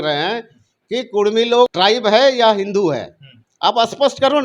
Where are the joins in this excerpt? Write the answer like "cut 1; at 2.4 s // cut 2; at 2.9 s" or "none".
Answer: cut 1; at 1.7 s